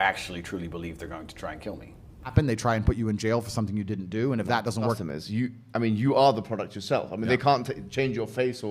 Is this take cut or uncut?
cut